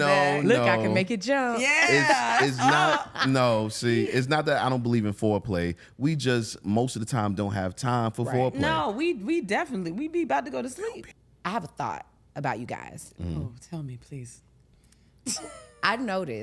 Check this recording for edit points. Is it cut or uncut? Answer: cut